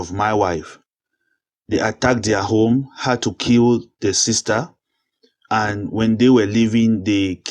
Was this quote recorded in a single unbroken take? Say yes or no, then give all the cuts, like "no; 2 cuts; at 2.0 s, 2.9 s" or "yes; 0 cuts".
yes; 0 cuts